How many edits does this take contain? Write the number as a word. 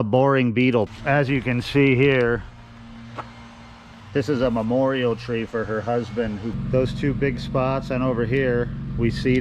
two